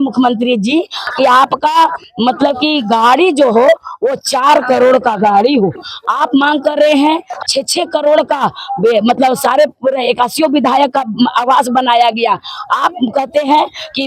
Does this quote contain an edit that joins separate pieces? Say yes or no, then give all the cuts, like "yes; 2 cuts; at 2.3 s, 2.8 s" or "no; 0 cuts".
no; 0 cuts